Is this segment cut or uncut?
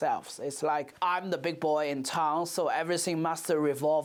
uncut